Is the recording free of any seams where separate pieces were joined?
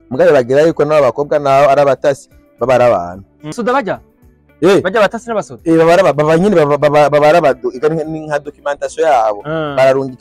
no; 1 cut; at 3.5 s

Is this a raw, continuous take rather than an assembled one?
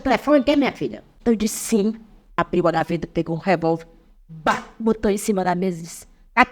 no; 2 cuts; at 1.0 s, 2.3 s

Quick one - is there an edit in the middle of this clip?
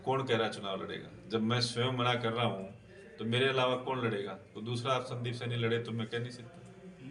no; 0 cuts

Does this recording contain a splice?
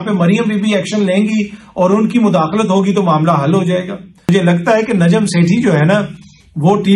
yes; 1 cut; at 4.3 s

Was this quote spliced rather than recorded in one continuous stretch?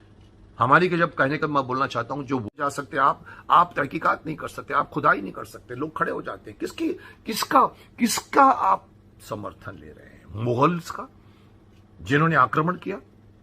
yes; 1 cut; at 2.5 s

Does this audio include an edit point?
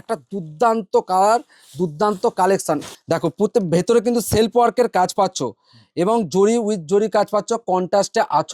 yes; 1 cut; at 2.9 s

